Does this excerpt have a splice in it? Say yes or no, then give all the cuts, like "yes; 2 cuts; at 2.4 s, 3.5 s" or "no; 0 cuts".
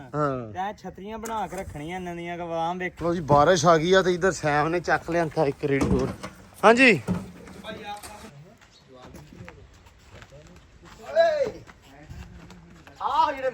yes; 2 cuts; at 2.9 s, 8.3 s